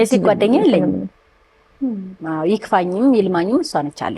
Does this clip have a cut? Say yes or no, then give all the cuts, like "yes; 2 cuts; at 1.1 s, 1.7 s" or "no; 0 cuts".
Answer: no; 0 cuts